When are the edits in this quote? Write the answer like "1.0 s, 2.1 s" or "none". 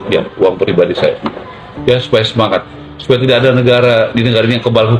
none